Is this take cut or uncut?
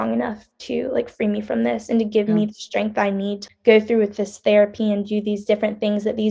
cut